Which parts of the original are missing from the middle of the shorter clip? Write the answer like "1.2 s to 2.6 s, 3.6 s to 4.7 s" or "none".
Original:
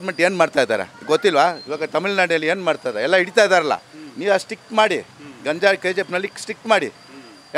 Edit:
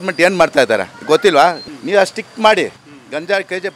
1.7 s to 4.0 s